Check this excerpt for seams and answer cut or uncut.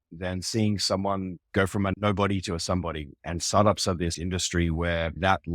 cut